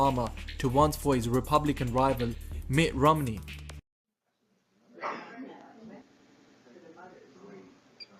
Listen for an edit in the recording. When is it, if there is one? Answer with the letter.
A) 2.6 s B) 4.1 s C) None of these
A